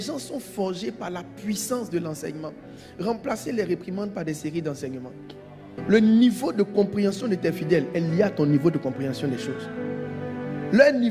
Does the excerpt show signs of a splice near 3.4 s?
no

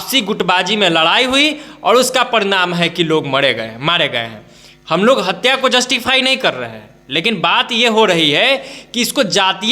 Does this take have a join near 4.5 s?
no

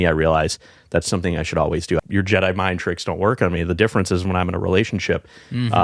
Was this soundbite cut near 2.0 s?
yes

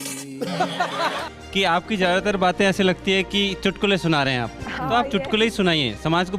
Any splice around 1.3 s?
yes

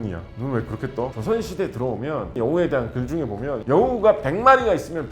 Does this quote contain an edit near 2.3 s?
yes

